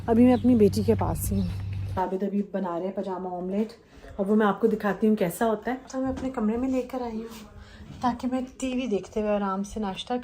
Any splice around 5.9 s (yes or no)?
yes